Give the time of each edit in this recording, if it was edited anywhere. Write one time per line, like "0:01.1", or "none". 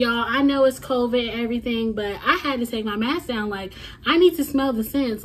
none